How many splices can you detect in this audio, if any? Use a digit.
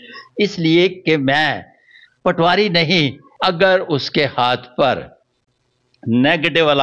1